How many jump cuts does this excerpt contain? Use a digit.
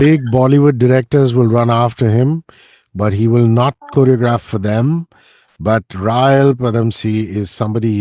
0